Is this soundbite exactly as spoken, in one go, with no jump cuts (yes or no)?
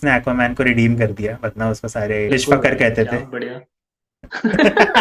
no